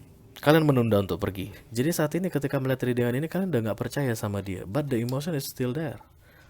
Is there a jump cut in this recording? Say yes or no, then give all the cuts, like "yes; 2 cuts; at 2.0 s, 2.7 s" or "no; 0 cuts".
yes; 1 cut; at 1.5 s